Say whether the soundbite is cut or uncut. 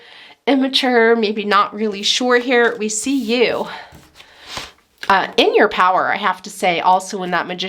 uncut